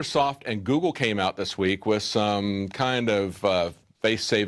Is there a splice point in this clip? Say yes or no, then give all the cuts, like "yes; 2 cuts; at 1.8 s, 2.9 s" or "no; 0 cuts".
yes; 1 cut; at 1.7 s